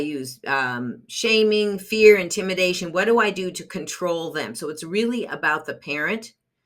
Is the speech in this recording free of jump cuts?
yes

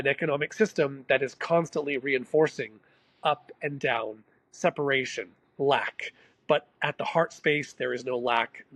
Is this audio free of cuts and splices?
yes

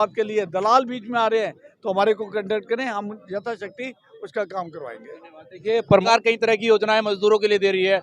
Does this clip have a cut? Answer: yes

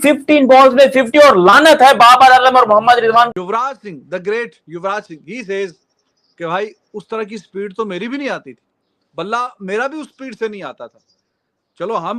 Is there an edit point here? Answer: yes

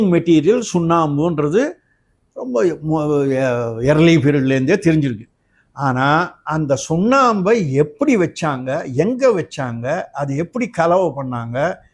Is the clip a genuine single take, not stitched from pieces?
yes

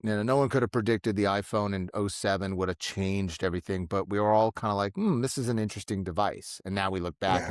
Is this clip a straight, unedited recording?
yes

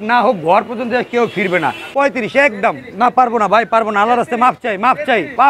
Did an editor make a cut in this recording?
yes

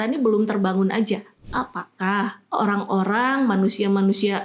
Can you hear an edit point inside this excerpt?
yes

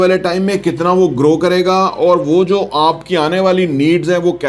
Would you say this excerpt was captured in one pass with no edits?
yes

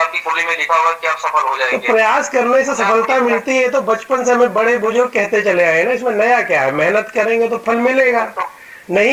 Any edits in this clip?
no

